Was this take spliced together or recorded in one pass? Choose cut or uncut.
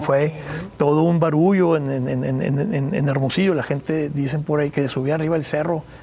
uncut